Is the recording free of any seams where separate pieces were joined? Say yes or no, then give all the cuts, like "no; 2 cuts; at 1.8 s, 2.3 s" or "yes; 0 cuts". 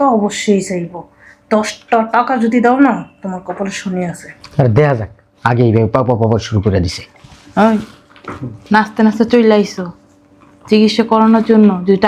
yes; 0 cuts